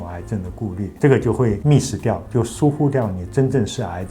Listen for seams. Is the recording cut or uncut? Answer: cut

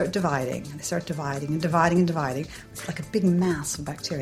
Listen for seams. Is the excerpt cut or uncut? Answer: uncut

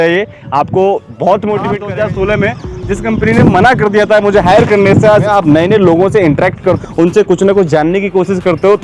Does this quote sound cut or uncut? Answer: cut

